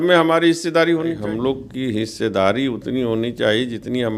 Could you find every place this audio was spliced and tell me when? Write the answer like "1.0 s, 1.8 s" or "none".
1.2 s